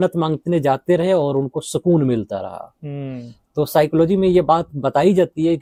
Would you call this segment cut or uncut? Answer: uncut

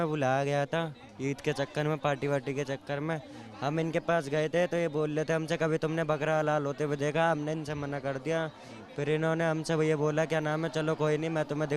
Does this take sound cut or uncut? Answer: uncut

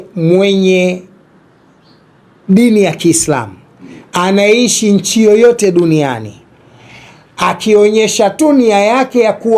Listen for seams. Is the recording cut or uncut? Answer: uncut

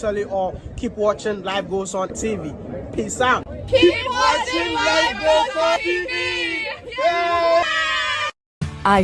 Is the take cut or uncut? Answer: uncut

